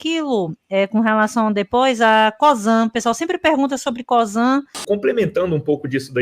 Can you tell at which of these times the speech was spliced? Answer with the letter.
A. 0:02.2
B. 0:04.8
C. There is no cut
B